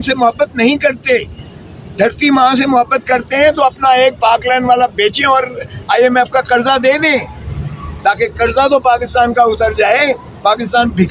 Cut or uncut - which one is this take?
uncut